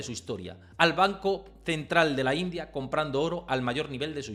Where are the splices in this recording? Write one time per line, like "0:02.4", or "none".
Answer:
none